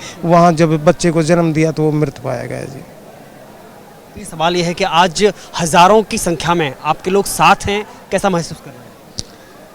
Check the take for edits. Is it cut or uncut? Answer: uncut